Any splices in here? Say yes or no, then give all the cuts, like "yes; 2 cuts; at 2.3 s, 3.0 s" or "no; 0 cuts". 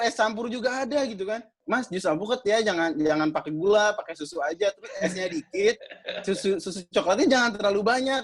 yes; 1 cut; at 1.5 s